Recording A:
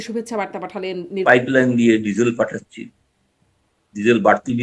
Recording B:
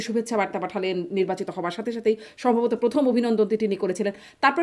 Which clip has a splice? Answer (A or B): A